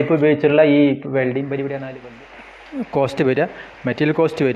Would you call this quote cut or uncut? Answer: cut